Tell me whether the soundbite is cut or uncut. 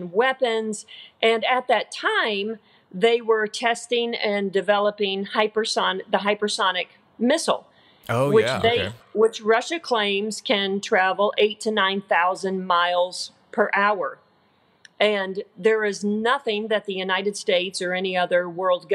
uncut